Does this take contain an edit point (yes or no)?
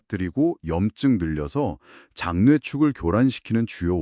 no